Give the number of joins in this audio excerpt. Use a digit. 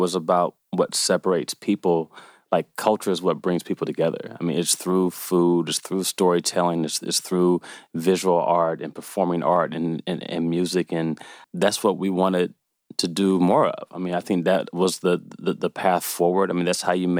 1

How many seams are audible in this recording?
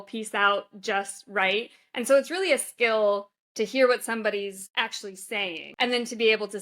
2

